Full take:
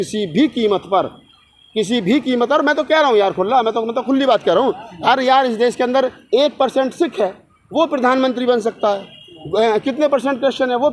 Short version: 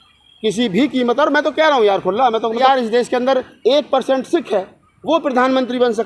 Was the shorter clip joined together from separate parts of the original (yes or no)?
yes